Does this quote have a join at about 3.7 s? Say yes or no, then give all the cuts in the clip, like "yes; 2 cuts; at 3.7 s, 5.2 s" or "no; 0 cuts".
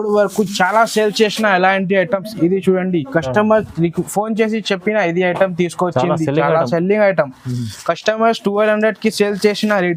no; 0 cuts